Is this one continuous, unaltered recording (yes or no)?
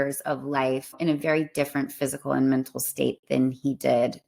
no